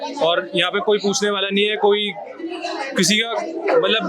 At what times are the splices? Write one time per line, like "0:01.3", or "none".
none